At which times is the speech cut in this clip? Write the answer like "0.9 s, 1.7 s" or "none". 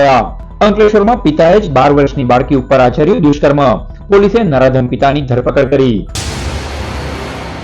6.3 s